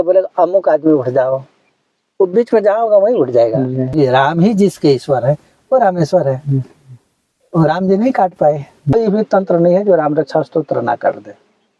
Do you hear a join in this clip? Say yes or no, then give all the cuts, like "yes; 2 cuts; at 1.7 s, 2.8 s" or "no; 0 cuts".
yes; 2 cuts; at 3.9 s, 8.9 s